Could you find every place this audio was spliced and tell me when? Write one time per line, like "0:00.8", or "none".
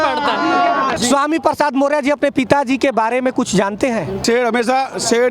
0:00.9
0:04.2